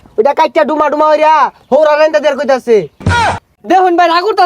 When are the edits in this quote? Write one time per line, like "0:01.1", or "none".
0:03.2